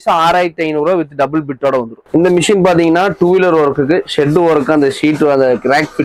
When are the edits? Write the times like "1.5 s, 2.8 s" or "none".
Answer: 2.0 s